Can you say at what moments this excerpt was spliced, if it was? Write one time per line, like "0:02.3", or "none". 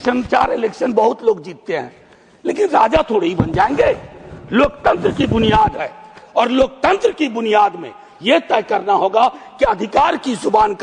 none